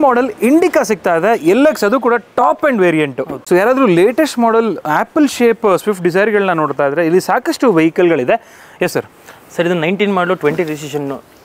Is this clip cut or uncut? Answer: uncut